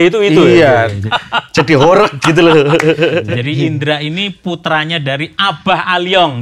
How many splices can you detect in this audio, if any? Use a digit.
2